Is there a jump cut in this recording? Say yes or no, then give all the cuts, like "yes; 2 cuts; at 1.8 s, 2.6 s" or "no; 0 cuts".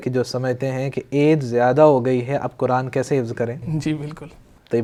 no; 0 cuts